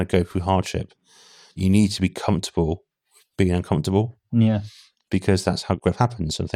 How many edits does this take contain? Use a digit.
2